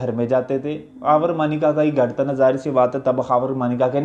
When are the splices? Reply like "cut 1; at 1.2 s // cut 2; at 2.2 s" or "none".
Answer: none